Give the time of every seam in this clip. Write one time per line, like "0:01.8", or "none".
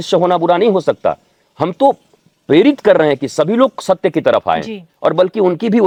none